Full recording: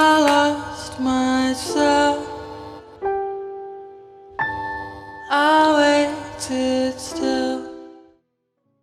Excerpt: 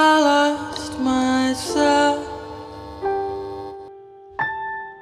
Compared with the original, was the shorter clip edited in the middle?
no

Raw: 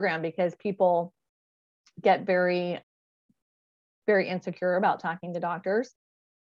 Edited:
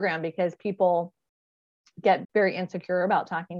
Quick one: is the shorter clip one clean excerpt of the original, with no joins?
no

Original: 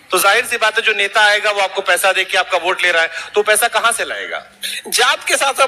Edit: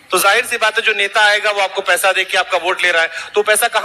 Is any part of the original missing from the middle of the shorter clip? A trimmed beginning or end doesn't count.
no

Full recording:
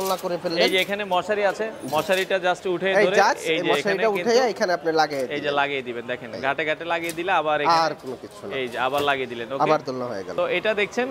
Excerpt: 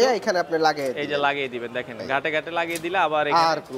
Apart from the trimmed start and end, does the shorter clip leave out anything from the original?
no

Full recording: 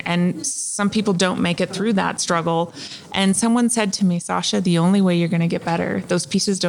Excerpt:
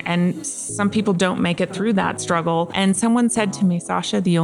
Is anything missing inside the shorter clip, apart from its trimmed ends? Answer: yes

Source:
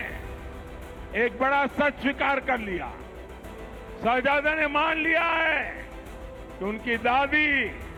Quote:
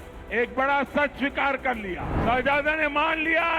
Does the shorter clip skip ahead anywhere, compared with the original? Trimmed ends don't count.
yes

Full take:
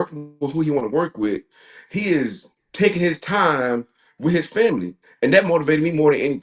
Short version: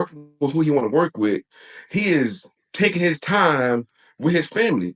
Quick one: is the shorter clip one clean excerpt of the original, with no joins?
yes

